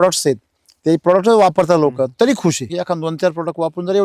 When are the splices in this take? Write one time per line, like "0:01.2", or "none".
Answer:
0:02.7